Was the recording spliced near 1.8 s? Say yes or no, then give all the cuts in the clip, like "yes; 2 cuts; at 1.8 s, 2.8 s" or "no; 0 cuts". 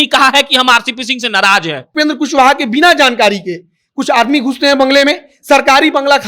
yes; 1 cut; at 1.8 s